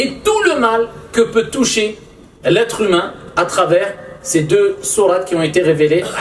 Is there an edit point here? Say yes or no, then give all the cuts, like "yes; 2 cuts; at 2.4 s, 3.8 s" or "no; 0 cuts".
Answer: no; 0 cuts